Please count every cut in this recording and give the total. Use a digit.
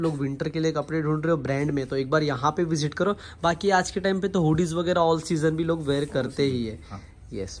0